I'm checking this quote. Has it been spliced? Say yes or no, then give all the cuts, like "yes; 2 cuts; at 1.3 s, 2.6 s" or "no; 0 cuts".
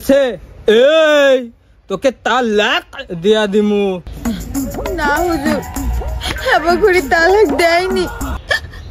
no; 0 cuts